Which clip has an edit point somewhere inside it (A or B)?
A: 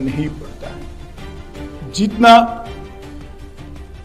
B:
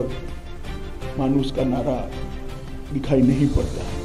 A